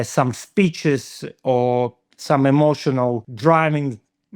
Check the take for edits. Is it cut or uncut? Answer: cut